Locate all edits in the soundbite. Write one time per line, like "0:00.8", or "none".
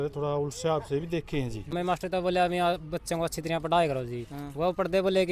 0:01.6